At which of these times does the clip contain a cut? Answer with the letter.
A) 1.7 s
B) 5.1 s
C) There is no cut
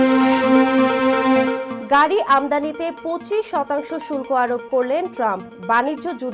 A